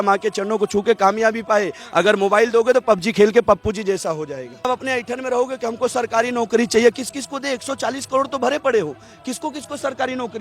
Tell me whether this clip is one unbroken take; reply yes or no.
no